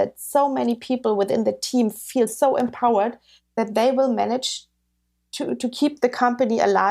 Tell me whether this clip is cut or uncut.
uncut